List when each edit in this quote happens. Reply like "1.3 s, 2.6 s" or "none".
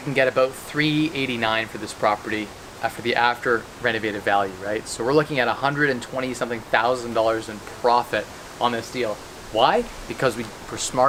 none